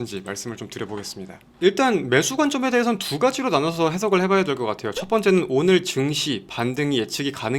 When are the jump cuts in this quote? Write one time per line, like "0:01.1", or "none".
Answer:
0:01.5